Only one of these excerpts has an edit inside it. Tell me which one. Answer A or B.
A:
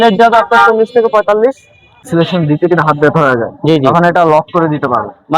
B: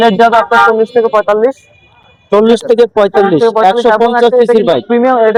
A